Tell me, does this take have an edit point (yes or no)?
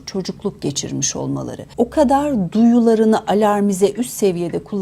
yes